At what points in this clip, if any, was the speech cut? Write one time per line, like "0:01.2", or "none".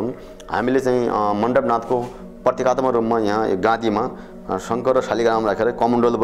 none

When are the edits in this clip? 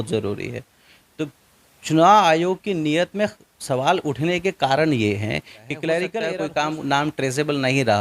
0:06.2

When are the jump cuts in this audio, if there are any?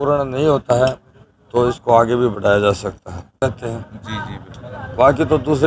0:03.4

